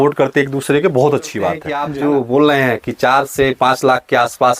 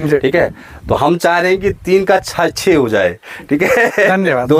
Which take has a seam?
first; 1 cut; at 1.7 s

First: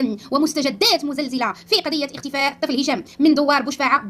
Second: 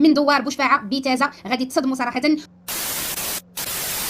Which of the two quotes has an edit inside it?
second; 1 cut; at 2.5 s

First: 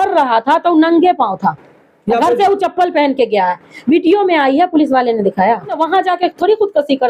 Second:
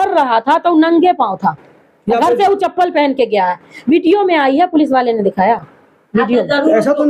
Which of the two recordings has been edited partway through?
first; 1 cut; at 5.7 s

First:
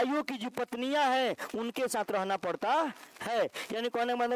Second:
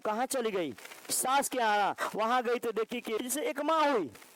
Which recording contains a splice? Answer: second; 1 cut; at 3.2 s

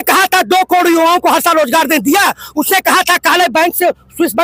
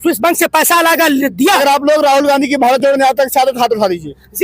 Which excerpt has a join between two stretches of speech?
second; 1 cut; at 1.6 s

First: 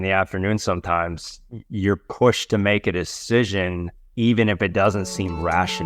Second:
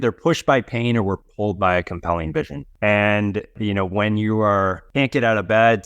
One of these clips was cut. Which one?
second; 3 cuts; at 2.6 s, 3.6 s, 4.8 s

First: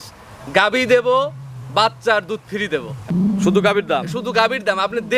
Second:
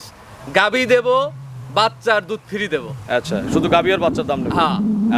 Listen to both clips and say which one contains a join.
first; 1 cut; at 3.1 s

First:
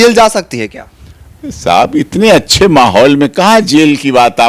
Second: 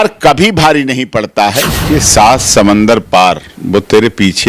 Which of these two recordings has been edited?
second; 2 cuts; at 1.8 s, 3.5 s

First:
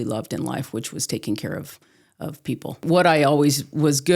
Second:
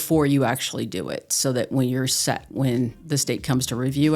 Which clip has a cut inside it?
first; 1 cut; at 2.8 s

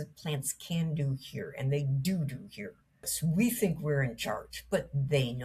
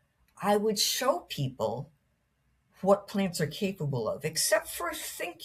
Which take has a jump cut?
first; 1 cut; at 3.1 s

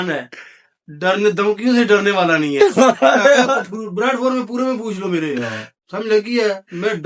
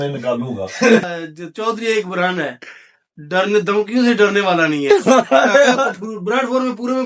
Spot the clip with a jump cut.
second; 1 cut; at 1.0 s

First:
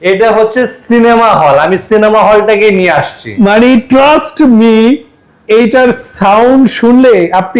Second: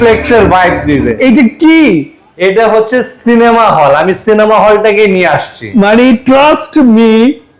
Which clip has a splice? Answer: second; 1 cut; at 1.1 s

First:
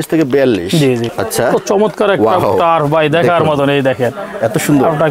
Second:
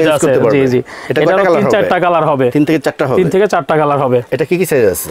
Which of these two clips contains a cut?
first; 1 cut; at 1.1 s

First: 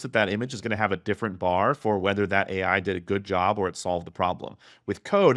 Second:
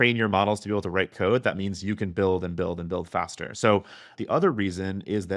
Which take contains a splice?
second; 1 cut; at 4.0 s

